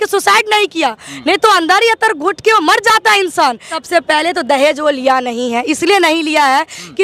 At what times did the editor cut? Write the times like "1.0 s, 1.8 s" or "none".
3.7 s